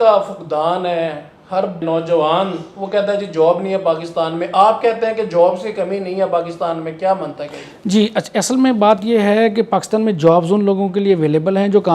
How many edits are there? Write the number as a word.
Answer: zero